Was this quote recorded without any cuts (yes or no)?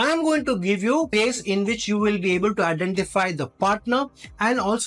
no